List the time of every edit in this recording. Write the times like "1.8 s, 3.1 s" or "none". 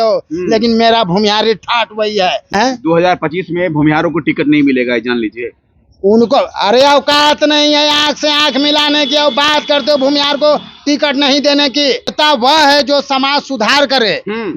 2.5 s, 12.1 s